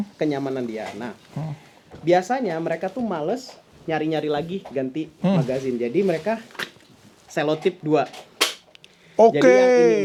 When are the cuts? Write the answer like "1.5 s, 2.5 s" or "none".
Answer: none